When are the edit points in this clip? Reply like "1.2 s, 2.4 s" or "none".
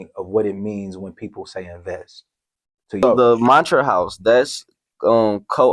3.0 s